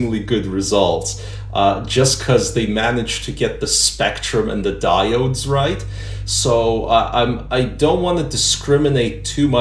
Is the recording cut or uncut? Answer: uncut